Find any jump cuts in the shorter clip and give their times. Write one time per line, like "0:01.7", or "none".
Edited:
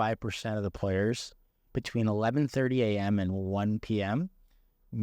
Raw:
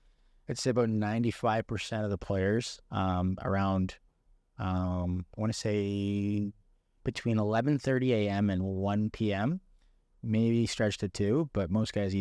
0:01.3